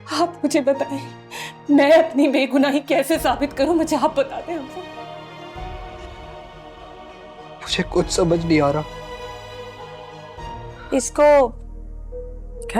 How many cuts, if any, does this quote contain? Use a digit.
1